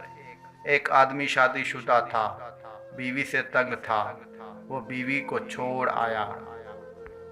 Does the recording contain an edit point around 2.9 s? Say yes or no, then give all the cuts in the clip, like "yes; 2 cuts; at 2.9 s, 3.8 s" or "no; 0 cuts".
no; 1 cut; at 6.4 s